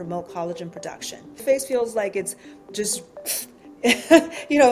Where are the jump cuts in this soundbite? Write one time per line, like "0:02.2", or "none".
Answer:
0:01.4